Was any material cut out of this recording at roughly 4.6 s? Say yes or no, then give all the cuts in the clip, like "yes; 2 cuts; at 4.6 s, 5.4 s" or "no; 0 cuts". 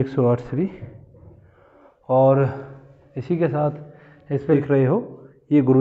yes; 1 cut; at 4.6 s